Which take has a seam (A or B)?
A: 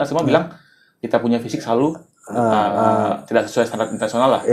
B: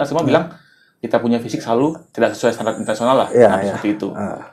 B